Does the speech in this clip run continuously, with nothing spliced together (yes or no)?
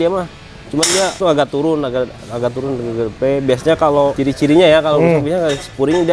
no